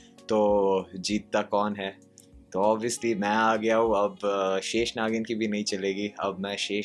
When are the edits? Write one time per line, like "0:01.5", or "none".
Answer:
none